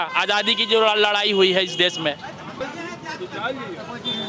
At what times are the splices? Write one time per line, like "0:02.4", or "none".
none